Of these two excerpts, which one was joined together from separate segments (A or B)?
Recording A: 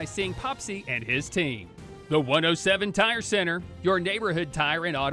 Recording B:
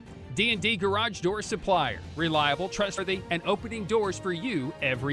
B